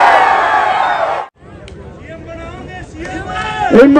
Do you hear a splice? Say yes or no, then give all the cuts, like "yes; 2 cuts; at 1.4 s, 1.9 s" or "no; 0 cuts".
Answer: yes; 1 cut; at 1.2 s